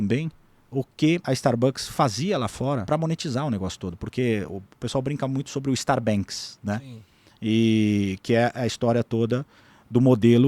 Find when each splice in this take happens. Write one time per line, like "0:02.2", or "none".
0:01.2
0:02.8

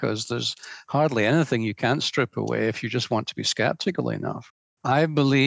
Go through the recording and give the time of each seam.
0:04.5

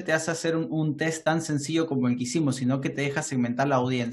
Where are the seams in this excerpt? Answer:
none

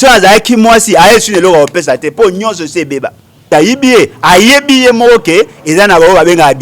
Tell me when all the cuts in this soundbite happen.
0:03.5

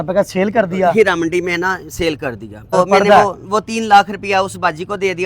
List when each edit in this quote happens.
0:02.7

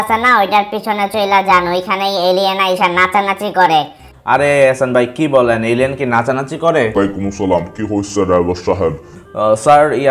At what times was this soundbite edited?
0:06.9

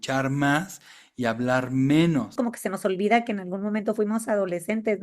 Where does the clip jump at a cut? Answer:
0:02.3

